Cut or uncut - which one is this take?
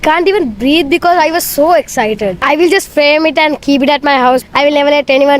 cut